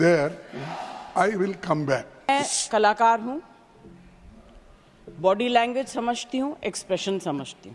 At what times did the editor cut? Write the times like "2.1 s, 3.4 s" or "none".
2.3 s

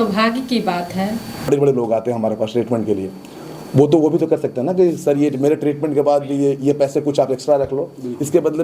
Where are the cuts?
1.5 s

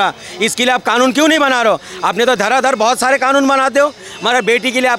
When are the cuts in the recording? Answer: none

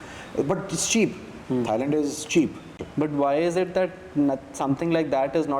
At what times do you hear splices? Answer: 2.8 s

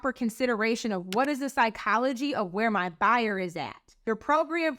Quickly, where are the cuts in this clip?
3.9 s

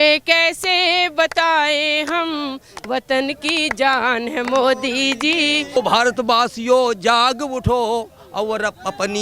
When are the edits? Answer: 5.8 s

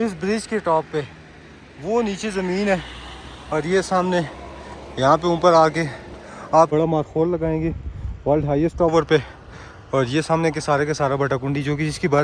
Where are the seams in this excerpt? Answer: 6.7 s

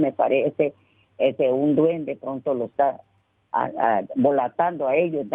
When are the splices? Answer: none

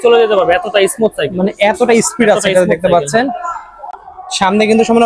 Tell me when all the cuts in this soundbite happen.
none

